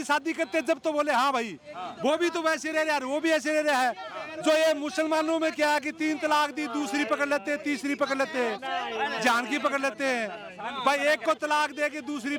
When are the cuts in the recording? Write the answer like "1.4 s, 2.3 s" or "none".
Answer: none